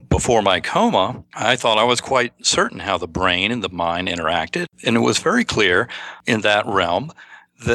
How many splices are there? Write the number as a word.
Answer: three